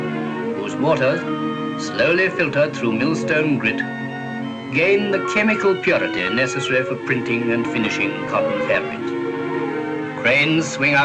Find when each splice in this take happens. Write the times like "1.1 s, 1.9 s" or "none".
none